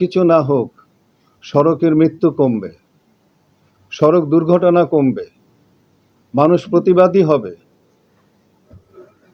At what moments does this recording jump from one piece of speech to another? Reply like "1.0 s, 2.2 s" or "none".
none